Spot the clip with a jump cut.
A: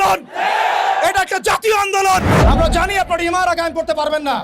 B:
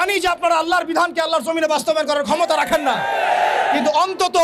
A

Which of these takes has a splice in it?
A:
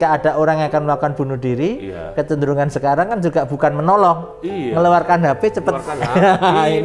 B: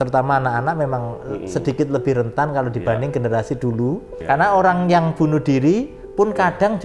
B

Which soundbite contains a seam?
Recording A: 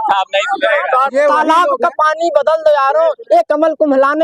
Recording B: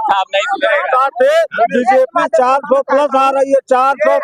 A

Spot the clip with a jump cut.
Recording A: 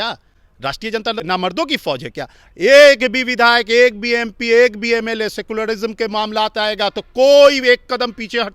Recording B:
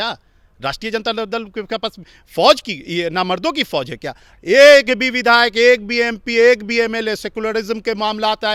A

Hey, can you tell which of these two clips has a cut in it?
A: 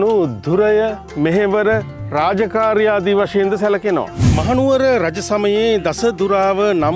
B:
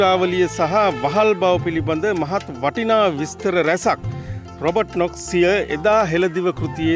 A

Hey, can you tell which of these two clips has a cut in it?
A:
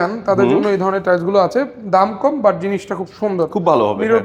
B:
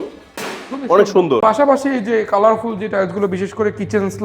B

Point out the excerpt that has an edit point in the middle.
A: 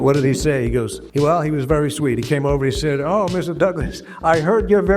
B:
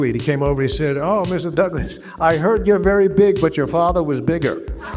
A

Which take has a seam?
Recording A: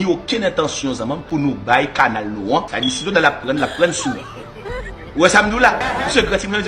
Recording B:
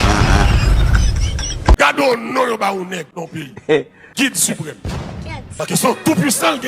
B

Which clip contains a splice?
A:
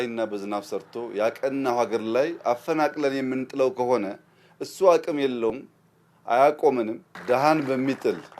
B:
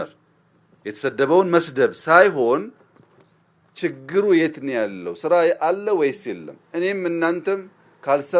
A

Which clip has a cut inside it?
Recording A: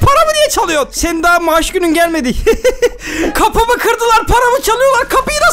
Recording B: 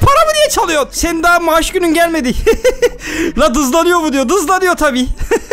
A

